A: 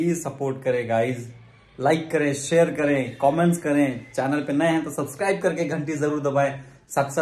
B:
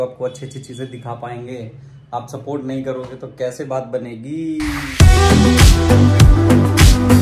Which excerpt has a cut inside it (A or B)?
B